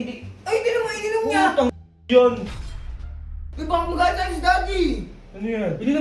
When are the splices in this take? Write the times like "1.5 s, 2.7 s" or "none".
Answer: 3.1 s